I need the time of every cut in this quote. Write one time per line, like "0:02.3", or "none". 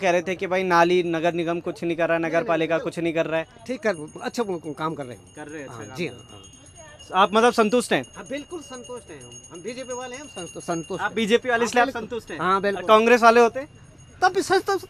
none